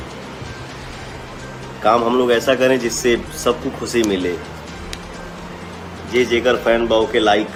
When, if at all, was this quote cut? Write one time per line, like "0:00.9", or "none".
none